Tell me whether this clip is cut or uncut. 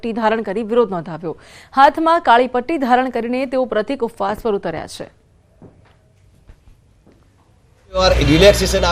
uncut